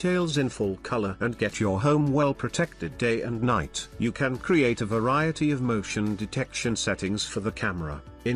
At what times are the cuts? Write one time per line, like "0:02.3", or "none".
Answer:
0:03.9